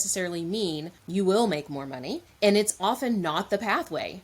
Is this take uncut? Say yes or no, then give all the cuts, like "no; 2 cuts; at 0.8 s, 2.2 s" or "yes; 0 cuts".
no; 2 cuts; at 0.9 s, 2.2 s